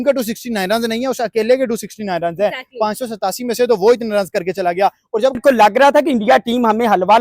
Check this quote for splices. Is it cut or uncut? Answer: cut